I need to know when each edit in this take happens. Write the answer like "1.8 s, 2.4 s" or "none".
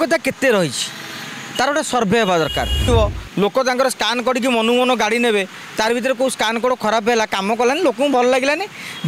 2.9 s